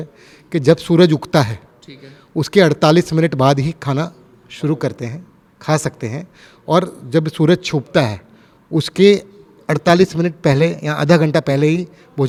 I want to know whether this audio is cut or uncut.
uncut